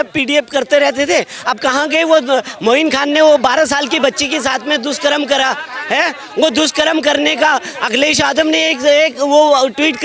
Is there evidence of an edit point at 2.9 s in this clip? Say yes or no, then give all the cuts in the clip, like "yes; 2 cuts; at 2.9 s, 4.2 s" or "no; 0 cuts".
no; 0 cuts